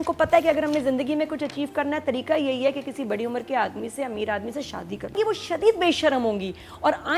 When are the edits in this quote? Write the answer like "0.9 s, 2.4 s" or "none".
5.1 s